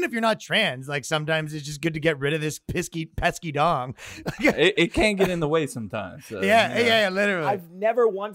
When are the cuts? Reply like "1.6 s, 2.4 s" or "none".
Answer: 7.4 s